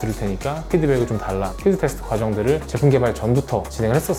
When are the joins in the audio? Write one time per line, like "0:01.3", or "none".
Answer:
none